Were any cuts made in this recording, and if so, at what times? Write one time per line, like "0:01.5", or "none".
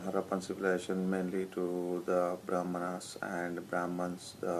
0:01.7